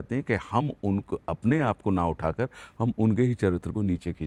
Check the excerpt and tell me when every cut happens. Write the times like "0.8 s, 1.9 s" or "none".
none